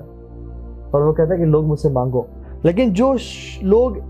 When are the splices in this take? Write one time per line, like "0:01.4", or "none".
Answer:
0:02.4